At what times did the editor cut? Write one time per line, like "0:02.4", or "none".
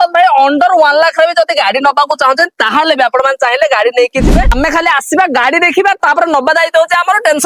0:04.4